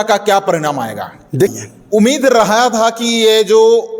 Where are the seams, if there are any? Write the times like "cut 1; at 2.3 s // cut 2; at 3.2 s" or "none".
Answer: cut 1; at 1.5 s

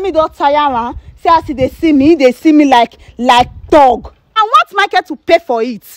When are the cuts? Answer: cut 1; at 4.4 s

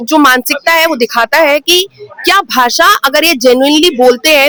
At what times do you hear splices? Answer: none

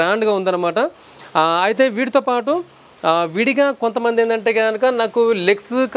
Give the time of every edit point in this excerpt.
none

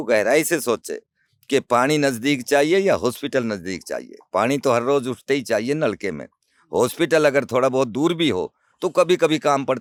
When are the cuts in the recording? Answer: none

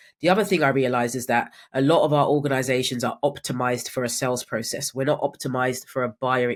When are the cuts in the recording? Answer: none

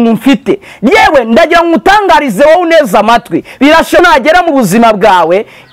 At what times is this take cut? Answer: cut 1; at 4.0 s

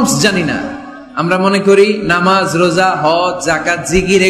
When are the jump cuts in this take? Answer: none

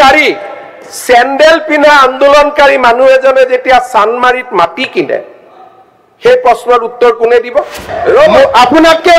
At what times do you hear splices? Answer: cut 1; at 7.9 s

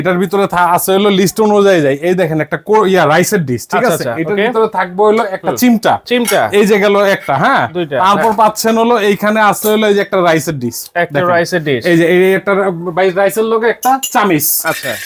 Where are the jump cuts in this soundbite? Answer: none

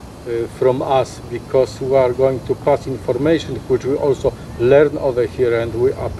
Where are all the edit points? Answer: none

